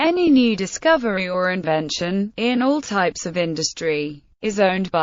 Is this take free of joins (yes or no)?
yes